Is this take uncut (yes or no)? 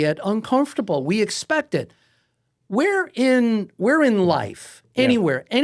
yes